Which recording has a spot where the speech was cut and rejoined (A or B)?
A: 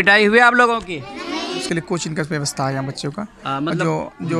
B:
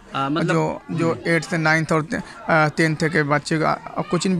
A